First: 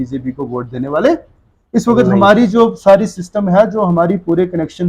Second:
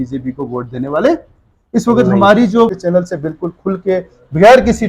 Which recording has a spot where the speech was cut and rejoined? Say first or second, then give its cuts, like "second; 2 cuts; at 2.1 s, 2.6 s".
second; 1 cut; at 2.8 s